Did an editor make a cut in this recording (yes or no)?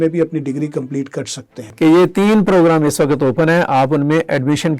yes